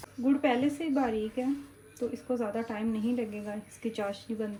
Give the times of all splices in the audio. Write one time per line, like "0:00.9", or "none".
none